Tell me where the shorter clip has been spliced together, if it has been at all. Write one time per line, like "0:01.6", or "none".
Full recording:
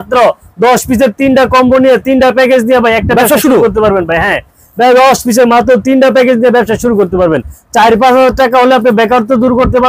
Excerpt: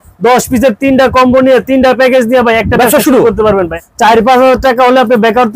0:03.8